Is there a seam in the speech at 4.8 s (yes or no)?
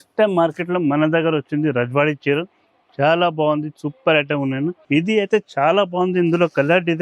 yes